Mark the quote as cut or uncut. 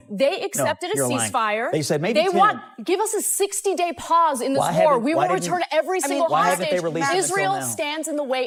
uncut